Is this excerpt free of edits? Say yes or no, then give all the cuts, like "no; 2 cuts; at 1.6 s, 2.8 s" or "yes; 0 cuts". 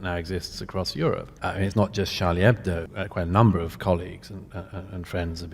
no; 2 cuts; at 1.3 s, 2.9 s